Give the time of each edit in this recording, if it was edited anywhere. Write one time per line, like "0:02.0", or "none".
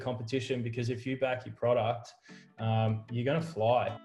none